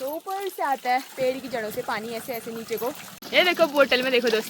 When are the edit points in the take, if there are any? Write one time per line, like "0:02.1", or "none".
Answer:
0:03.1